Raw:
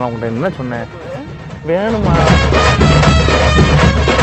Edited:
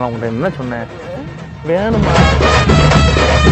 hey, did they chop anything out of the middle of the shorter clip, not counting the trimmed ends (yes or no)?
yes